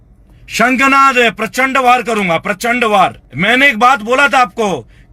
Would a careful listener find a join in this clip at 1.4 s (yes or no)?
no